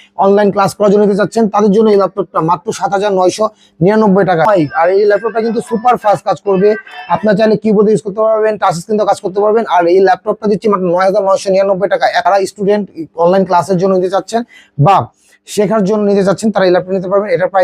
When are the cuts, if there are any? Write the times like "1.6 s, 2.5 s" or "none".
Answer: 4.4 s, 12.2 s